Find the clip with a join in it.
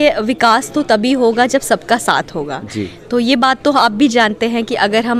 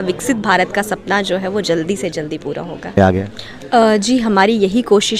second; 1 cut; at 3.0 s

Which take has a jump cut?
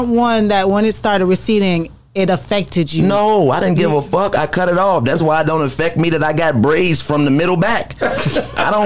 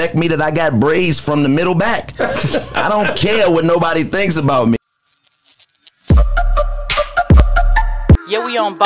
second; 1 cut; at 4.8 s

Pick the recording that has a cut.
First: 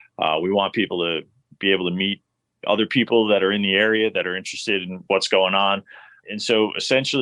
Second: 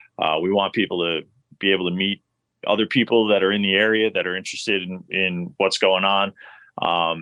first; 2 cuts; at 5.0 s, 6.2 s

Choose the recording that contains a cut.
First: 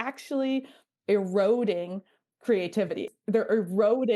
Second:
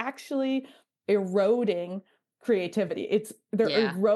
first; 1 cut; at 3.0 s

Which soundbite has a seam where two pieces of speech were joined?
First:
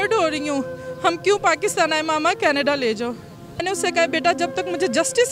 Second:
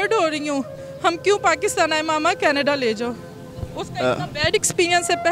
first; 1 cut; at 3.6 s

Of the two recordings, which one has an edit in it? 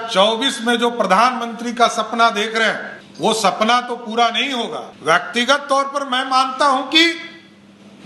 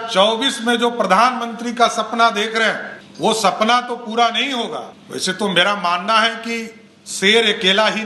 second; 1 cut; at 4.9 s

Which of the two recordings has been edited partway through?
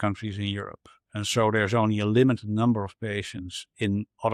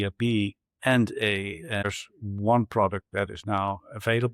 second; 1 cut; at 1.8 s

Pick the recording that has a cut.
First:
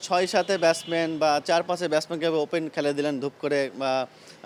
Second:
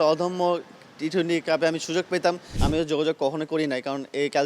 second; 1 cut; at 2.5 s

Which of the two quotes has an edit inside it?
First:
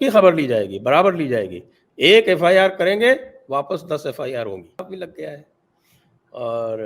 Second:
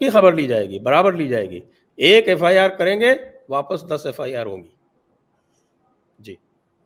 first; 1 cut; at 4.8 s

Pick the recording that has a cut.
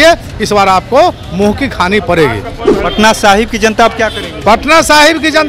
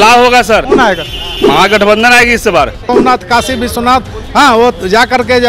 second; 2 cuts; at 0.9 s, 2.9 s

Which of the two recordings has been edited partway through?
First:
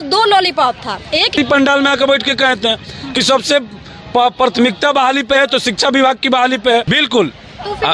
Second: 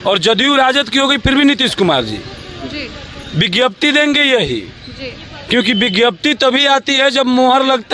first; 2 cuts; at 1.3 s, 6.9 s

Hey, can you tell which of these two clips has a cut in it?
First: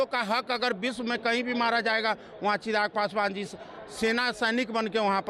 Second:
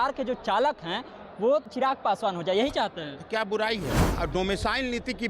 second; 2 cuts; at 1.6 s, 4.0 s

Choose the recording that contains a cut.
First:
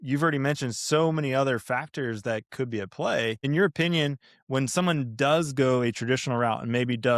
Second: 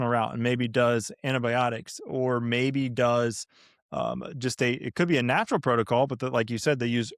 first; 1 cut; at 3.4 s

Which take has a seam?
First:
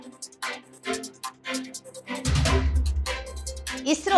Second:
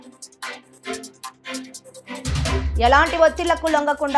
second; 1 cut; at 2.7 s

